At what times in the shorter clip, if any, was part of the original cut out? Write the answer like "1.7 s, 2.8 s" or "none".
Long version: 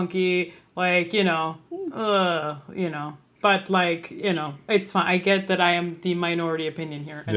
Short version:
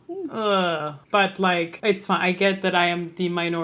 1.0 s, 1.7 s